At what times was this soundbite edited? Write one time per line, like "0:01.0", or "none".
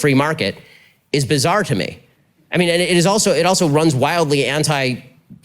0:03.5